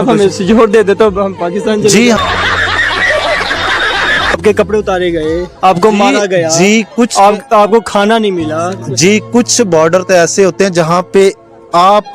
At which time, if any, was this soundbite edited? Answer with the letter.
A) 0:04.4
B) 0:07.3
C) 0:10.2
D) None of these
A